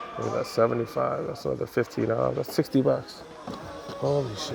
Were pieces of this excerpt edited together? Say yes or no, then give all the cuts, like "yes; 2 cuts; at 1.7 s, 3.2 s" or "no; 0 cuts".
no; 0 cuts